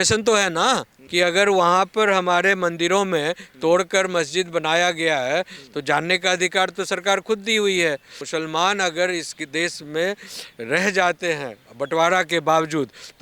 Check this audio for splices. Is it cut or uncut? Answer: cut